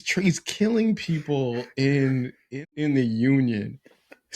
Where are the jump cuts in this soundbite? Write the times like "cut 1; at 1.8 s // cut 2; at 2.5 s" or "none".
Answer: cut 1; at 2.6 s